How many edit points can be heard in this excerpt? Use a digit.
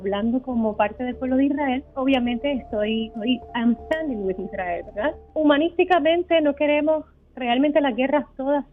3